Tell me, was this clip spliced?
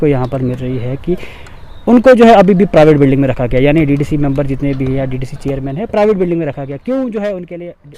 no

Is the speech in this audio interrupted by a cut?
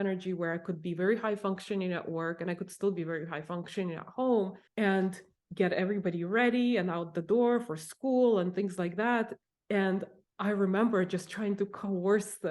yes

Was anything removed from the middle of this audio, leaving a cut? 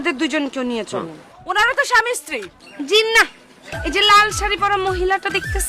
yes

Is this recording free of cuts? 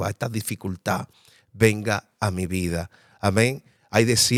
yes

